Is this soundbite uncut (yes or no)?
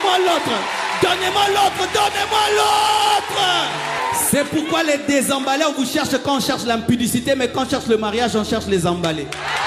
no